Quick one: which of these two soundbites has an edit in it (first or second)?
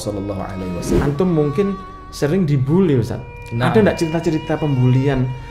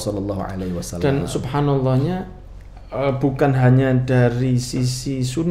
first